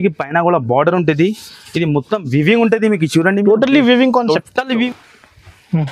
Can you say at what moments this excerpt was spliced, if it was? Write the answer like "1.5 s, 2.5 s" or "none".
4.9 s